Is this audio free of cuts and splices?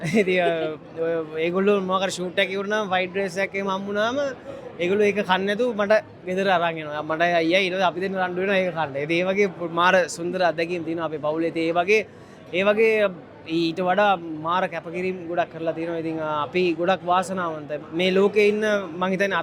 yes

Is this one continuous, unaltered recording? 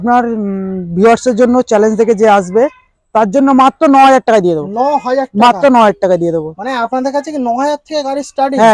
yes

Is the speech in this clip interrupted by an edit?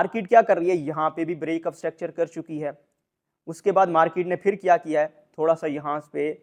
no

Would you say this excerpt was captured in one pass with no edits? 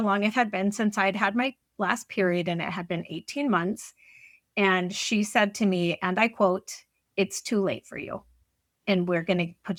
yes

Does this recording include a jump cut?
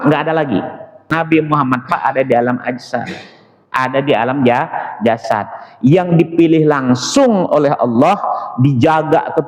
yes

